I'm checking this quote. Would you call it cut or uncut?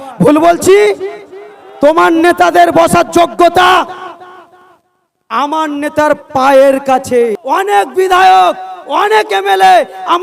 cut